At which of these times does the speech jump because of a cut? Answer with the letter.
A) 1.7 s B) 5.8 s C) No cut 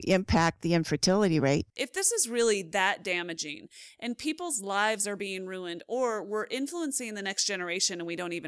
A